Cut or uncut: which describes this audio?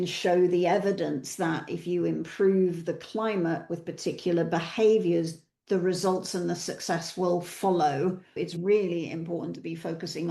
cut